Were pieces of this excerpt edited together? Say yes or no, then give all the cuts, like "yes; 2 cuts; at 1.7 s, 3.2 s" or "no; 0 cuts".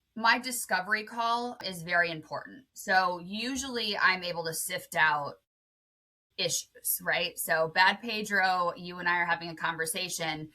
yes; 1 cut; at 1.6 s